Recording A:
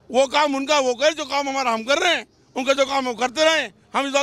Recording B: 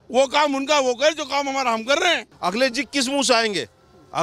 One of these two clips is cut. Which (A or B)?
B